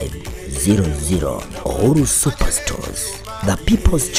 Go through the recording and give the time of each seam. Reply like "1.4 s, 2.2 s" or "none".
none